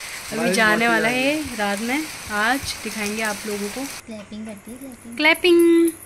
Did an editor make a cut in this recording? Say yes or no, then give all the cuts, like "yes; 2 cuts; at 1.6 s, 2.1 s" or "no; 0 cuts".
yes; 1 cut; at 4.0 s